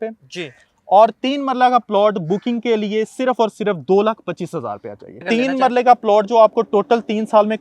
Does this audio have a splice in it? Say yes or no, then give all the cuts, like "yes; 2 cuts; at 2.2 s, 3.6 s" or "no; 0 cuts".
yes; 1 cut; at 5.1 s